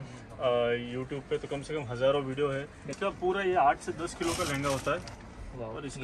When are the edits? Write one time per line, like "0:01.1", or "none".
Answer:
0:02.9